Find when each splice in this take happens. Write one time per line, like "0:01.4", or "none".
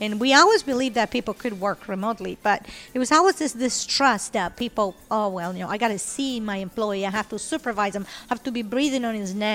none